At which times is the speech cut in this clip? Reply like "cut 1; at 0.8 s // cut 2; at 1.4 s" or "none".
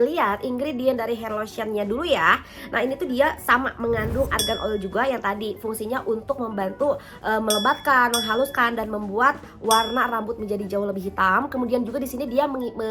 none